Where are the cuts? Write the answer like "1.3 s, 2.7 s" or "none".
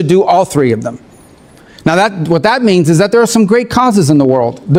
none